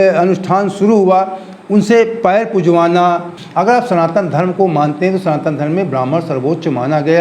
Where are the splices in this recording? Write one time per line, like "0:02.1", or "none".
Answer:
0:03.4